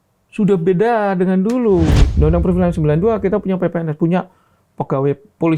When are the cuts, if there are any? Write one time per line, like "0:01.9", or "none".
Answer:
0:02.0